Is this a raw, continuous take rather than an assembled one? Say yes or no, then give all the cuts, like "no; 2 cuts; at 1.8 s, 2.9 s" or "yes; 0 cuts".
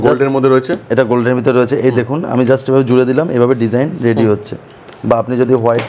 yes; 0 cuts